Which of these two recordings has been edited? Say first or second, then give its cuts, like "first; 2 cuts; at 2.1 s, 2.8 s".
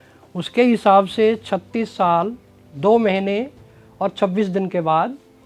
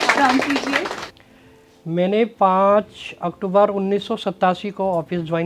second; 1 cut; at 1.1 s